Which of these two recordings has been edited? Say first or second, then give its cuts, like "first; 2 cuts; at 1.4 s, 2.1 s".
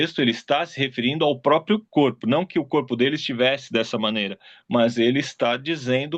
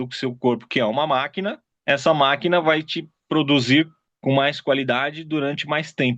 second; 2 cuts; at 1.7 s, 4.0 s